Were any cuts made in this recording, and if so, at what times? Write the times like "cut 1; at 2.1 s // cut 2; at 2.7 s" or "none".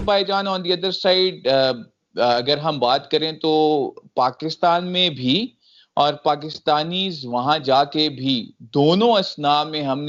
none